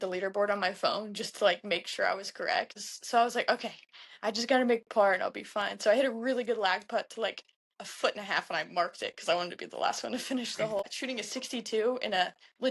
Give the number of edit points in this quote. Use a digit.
2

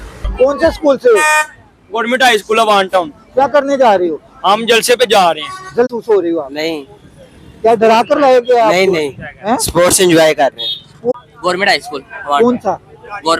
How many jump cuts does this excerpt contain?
2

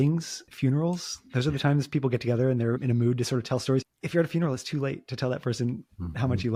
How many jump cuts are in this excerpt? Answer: 0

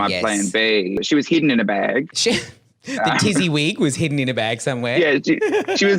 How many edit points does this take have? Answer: 1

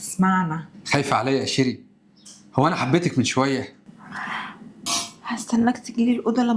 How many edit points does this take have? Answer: 2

